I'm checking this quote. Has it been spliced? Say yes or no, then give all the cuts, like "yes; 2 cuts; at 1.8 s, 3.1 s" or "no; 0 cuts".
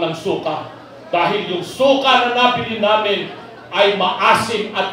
no; 0 cuts